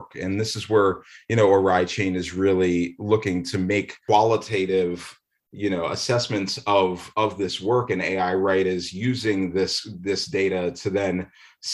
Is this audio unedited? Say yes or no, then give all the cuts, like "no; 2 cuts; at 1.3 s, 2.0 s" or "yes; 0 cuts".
no; 1 cut; at 4.0 s